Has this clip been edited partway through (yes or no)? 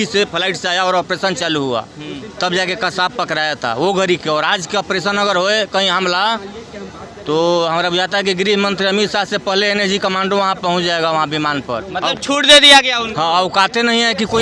no